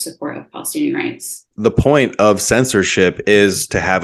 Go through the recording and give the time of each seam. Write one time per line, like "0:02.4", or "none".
0:01.4